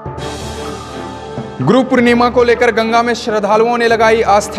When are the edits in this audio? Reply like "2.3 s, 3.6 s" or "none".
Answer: 1.2 s